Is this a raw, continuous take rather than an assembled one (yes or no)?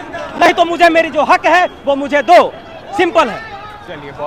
yes